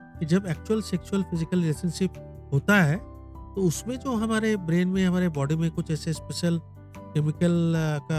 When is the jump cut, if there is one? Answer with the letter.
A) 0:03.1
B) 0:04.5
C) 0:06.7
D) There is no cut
D